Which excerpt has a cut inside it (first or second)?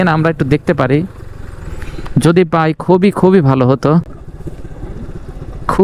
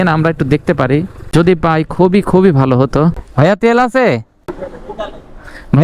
second